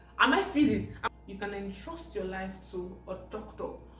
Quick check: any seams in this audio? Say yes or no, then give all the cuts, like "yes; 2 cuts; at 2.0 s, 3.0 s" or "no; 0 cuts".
yes; 1 cut; at 1.0 s